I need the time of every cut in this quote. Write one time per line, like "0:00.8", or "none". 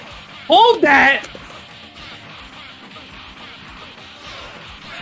none